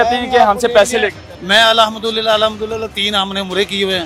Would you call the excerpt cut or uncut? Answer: uncut